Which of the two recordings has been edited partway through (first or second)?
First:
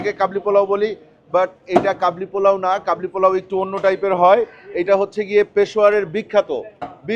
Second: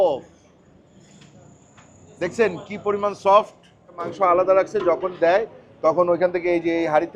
second